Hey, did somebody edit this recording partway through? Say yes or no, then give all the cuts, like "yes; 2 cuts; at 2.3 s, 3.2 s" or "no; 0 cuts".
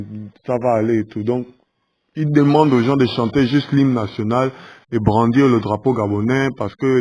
no; 0 cuts